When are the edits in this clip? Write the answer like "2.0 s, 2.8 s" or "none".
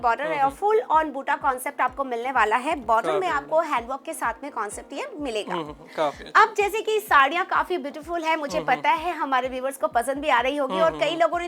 none